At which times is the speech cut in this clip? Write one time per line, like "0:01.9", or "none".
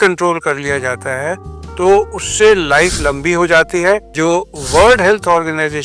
0:04.1

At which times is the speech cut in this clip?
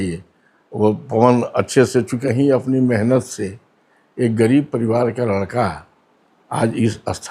0:02.2

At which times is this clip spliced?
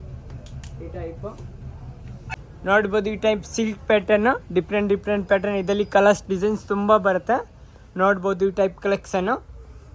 0:02.3

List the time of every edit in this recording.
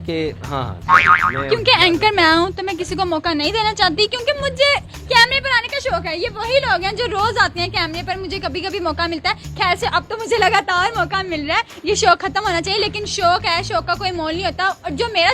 none

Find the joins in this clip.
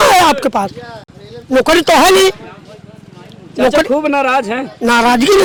none

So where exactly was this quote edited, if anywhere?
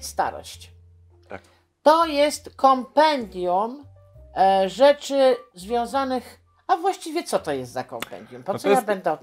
none

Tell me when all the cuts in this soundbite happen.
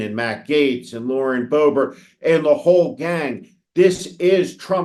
none

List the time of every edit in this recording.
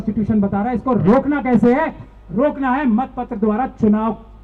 none

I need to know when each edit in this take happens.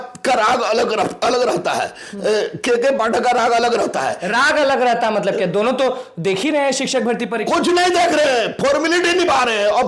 none

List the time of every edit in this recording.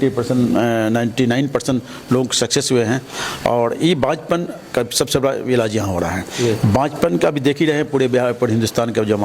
none

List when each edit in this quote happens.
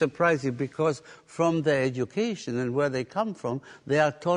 none

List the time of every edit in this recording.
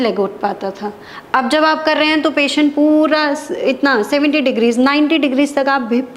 none

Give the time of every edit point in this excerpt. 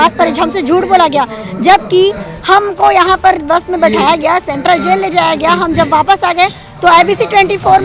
none

